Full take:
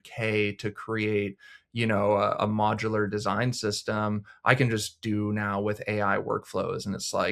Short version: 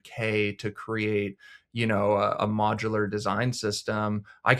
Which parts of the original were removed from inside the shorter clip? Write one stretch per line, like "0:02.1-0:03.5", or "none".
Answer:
none